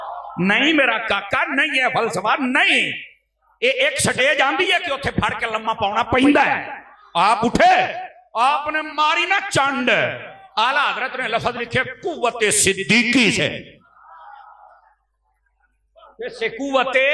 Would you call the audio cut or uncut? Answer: uncut